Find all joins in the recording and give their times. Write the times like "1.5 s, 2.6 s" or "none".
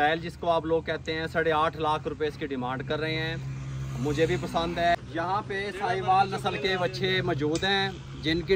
none